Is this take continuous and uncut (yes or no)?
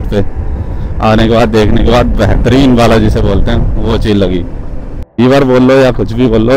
no